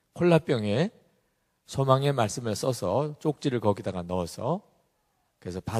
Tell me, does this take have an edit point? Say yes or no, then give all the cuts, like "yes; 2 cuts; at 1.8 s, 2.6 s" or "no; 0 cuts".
yes; 1 cut; at 1.6 s